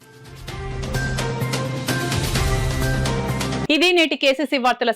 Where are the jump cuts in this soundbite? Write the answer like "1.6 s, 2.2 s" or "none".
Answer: none